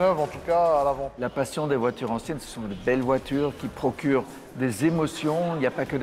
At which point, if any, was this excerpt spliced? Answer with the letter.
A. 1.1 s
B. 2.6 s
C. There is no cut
A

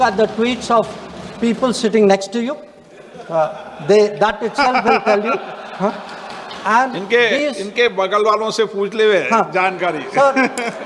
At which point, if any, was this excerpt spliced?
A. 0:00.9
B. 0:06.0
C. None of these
C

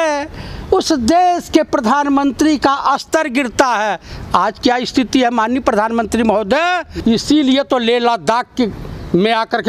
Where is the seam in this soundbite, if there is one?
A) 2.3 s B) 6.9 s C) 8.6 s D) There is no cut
B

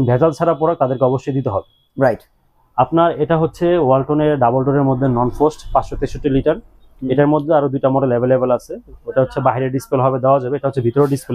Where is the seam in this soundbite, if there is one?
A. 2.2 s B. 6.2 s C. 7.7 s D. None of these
D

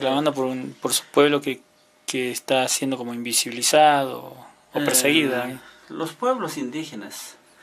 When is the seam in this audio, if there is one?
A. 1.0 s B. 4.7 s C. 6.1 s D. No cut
A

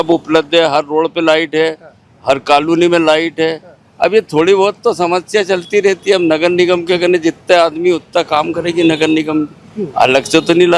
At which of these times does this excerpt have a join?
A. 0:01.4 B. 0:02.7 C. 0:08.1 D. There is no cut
D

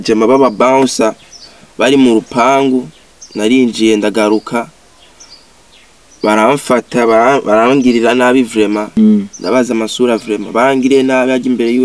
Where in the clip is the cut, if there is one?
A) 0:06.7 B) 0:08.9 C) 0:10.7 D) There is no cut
B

